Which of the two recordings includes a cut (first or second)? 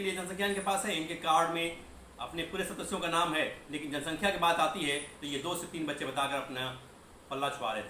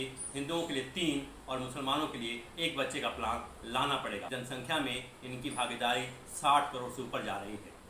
second